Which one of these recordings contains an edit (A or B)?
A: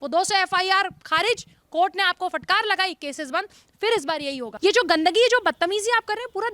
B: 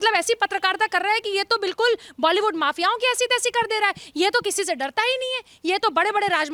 A